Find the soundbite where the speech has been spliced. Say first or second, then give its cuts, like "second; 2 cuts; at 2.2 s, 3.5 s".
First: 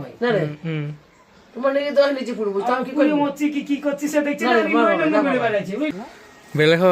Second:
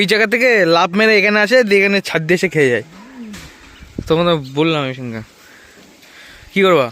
first; 1 cut; at 5.9 s